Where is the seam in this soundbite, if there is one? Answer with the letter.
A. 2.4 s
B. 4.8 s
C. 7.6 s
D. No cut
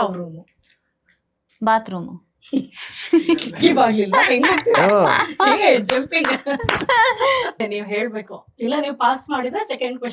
C